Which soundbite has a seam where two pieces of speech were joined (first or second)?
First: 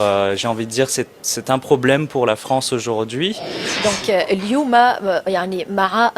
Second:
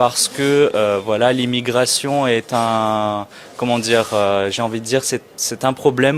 first